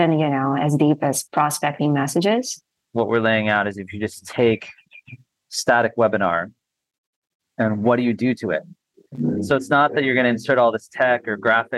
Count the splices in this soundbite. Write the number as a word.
one